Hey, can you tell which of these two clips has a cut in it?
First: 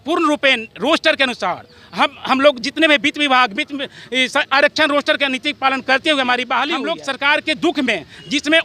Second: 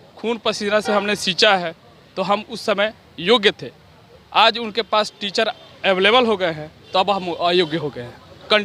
first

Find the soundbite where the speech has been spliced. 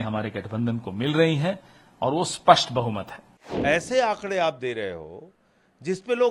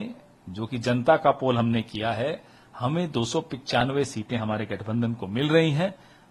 first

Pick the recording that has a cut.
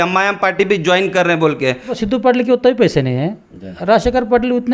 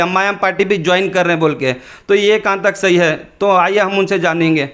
first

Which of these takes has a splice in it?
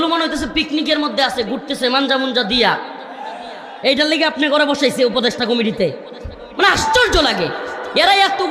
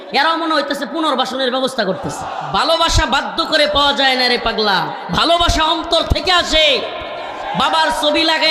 second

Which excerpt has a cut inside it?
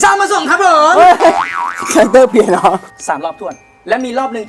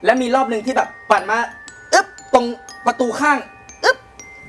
first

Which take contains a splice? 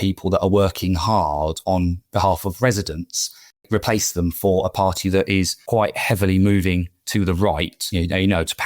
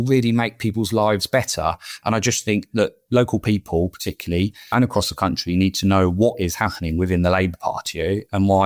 first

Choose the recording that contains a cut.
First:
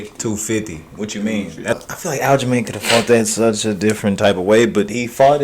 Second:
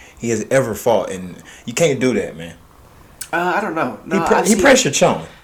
first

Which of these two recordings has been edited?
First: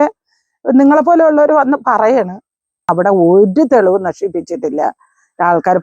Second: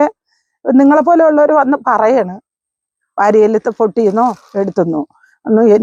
first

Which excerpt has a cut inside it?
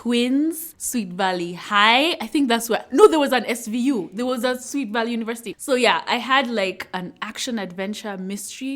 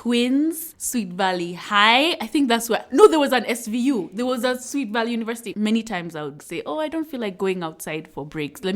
second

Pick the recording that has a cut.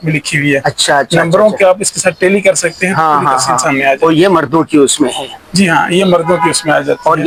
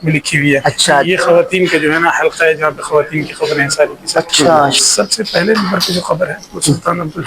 second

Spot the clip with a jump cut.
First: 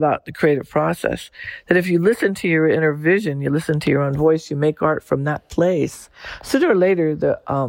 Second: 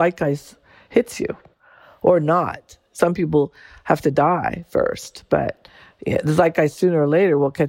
second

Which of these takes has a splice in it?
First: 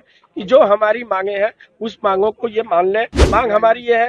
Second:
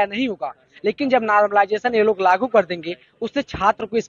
first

